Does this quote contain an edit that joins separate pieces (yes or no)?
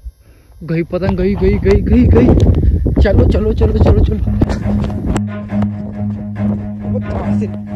no